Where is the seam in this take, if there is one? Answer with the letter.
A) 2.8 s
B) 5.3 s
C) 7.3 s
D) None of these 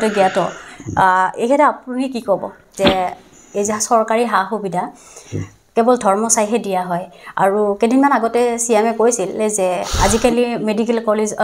A